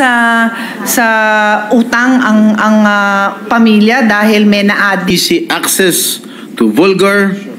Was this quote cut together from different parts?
yes; 1 cut; at 5.1 s

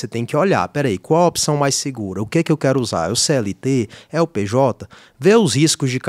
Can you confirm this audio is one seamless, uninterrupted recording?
yes; 0 cuts

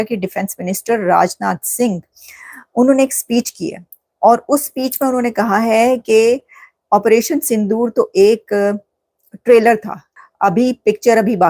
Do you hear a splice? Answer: yes; 1 cut; at 10.1 s

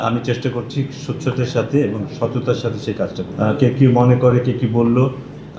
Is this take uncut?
no; 1 cut; at 3.3 s

